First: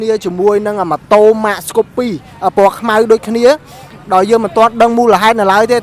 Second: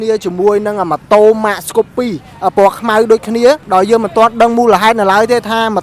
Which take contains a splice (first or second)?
second